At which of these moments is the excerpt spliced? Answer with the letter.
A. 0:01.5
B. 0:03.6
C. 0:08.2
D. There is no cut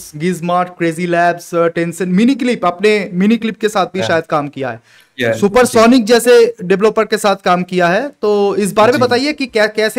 D